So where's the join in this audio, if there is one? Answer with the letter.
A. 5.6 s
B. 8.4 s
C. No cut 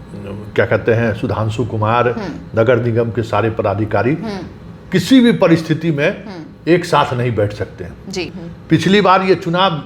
B